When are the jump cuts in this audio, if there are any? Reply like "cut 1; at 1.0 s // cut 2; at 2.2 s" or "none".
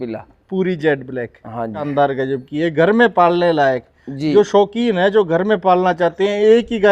cut 1; at 1.8 s

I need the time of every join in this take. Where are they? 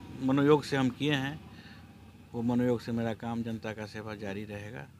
none

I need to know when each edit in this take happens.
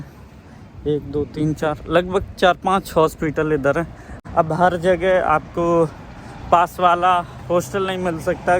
cut 1; at 4.1 s

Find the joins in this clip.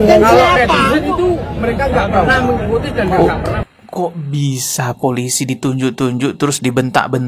none

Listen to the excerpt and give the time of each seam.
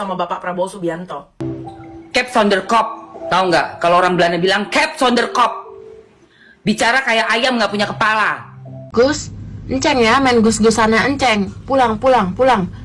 cut 1; at 1.5 s // cut 2; at 8.8 s

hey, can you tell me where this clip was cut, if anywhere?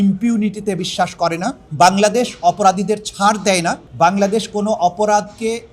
cut 1; at 1.6 s // cut 2; at 3.8 s

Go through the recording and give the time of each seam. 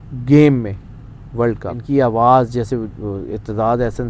cut 1; at 1.7 s

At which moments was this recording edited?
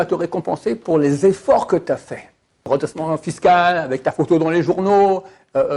cut 1; at 2.7 s

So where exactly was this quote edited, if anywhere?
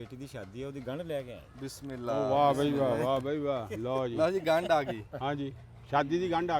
none

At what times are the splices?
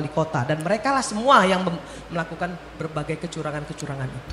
none

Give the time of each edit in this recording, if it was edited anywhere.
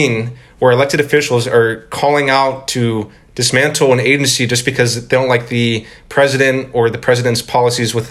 none

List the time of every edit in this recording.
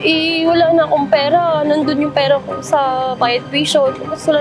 none

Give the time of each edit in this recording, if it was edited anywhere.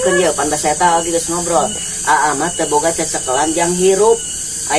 none

